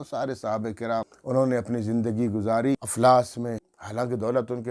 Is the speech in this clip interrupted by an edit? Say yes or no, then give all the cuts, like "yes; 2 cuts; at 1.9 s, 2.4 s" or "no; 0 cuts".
yes; 3 cuts; at 1.2 s, 2.9 s, 3.7 s